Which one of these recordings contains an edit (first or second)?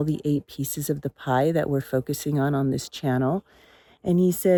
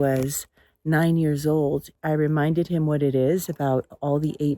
second